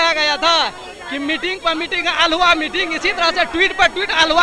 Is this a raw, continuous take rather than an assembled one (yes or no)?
yes